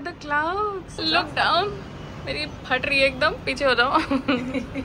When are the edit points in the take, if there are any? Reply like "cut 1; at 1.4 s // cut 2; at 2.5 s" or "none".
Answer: cut 1; at 1.0 s